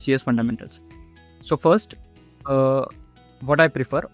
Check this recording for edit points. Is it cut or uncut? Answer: uncut